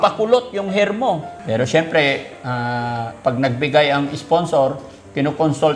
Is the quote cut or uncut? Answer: cut